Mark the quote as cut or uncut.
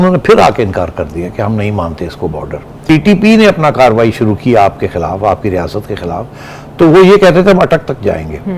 cut